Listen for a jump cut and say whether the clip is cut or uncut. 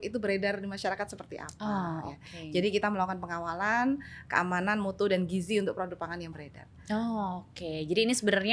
uncut